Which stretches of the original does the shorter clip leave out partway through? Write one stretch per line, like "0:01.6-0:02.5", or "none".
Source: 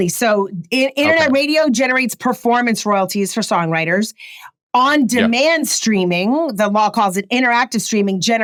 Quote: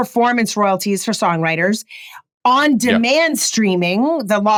none